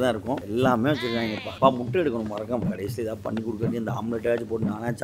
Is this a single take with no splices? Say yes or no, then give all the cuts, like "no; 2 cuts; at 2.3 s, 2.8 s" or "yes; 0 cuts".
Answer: yes; 0 cuts